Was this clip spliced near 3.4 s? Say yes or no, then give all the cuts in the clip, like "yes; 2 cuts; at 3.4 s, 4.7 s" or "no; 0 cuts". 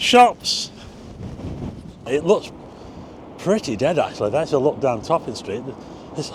no; 1 cut; at 2.1 s